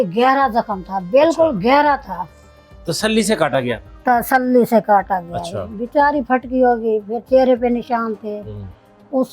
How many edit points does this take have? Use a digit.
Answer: 0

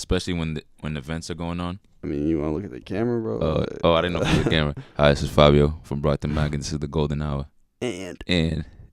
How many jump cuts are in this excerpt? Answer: 2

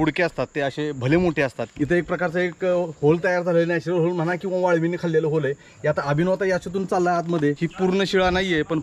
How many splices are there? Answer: 2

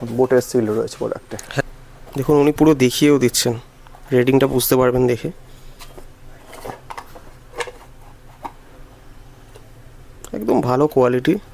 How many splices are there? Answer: 1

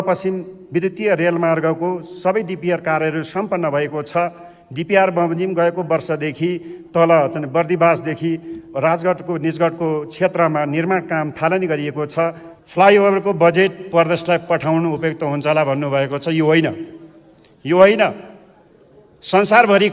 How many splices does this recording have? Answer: 1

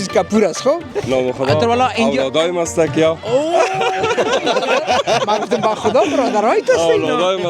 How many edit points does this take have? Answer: 1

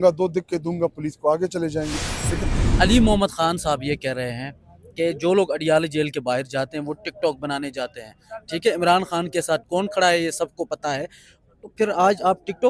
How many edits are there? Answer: 1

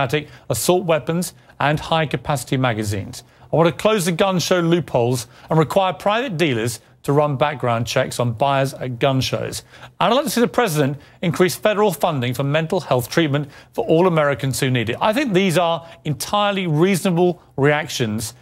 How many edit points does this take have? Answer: 1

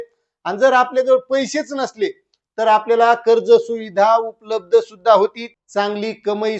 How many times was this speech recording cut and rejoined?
1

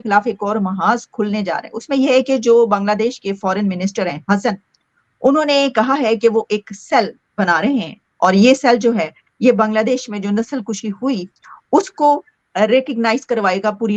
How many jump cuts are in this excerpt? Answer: 0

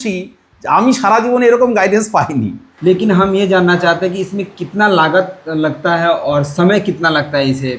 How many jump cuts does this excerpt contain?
1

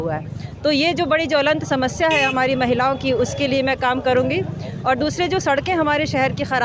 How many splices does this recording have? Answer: 0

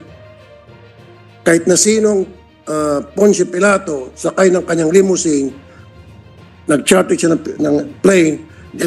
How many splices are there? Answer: 0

